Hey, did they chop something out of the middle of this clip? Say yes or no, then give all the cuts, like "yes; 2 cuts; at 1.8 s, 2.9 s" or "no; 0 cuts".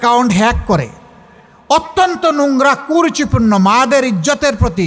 no; 0 cuts